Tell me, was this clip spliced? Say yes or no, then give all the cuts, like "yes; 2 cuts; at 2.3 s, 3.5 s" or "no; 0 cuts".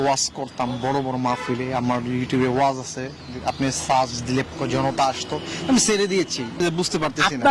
yes; 2 cuts; at 4.5 s, 6.6 s